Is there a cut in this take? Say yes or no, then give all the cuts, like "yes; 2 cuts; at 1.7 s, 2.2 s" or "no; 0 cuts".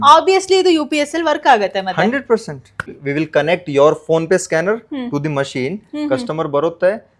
yes; 1 cut; at 2.8 s